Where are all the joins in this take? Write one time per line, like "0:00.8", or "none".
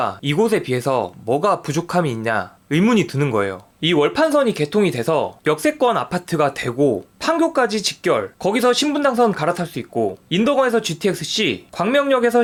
none